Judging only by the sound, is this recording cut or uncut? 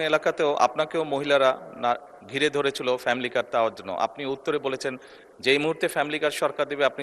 uncut